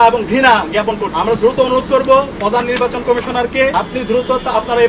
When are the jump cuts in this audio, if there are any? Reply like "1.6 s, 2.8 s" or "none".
1.1 s, 3.7 s